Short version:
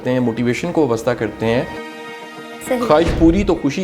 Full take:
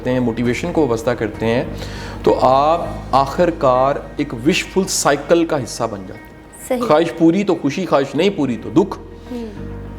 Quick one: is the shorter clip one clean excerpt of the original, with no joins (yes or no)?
no